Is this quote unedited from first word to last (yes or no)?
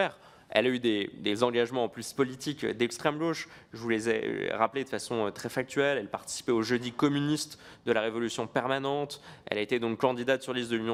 yes